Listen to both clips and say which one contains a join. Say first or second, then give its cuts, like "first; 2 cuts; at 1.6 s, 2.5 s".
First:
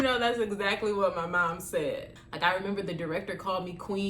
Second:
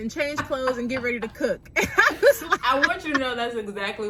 first; 1 cut; at 2.1 s